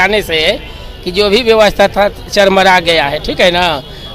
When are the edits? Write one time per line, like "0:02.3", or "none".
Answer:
none